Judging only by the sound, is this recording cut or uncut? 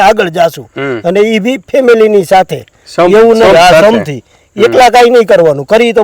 uncut